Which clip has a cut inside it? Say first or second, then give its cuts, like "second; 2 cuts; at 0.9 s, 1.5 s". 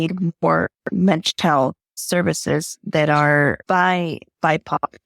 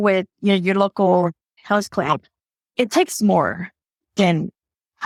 first; 2 cuts; at 1.9 s, 3.6 s